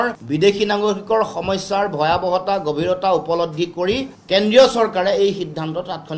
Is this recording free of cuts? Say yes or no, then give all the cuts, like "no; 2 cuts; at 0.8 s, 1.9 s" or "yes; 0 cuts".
yes; 0 cuts